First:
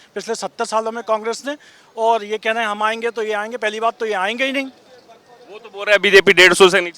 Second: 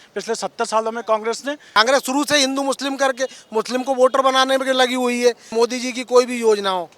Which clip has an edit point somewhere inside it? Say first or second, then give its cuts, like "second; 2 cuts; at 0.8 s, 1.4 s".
second; 2 cuts; at 1.8 s, 5.5 s